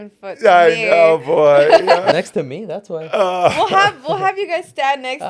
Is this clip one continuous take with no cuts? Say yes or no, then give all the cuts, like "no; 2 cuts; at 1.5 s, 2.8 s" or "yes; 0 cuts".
no; 1 cut; at 2.1 s